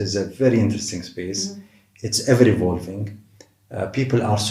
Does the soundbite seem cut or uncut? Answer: uncut